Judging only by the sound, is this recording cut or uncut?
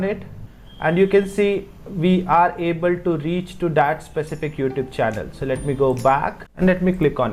cut